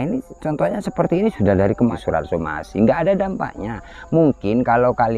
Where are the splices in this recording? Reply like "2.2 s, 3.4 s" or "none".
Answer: 1.9 s